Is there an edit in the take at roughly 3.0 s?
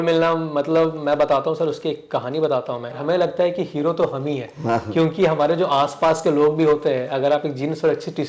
yes; 1 cut; at 3.0 s

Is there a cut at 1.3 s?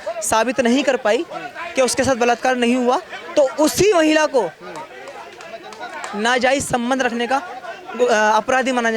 no; 0 cuts

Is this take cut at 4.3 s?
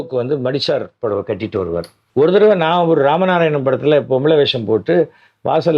no; 1 cut; at 2.0 s

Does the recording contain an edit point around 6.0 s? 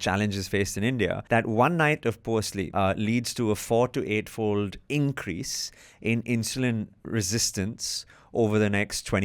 no; 2 cuts; at 1.2 s, 2.6 s

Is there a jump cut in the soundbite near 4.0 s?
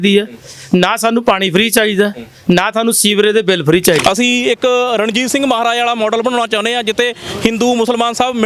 yes; 1 cut; at 4.0 s

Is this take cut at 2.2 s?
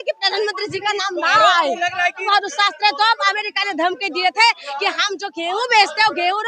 yes; 1 cut; at 2.2 s

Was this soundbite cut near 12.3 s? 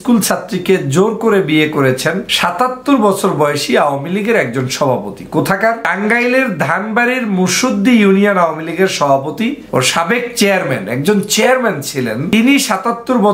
yes; 4 cuts; at 2.3 s, 5.9 s, 9.6 s, 12.3 s

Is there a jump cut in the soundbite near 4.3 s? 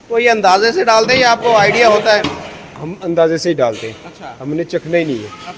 no; 0 cuts

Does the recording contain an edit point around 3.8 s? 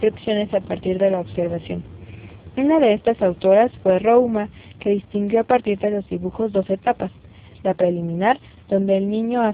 yes; 1 cut; at 3.8 s

